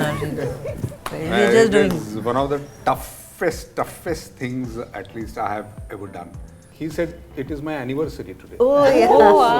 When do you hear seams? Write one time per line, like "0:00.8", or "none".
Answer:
0:06.6